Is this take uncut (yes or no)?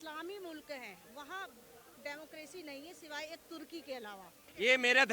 yes